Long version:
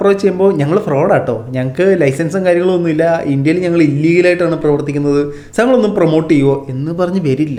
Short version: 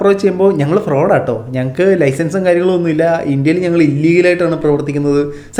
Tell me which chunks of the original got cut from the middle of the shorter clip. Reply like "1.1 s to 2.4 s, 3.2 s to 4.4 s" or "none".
none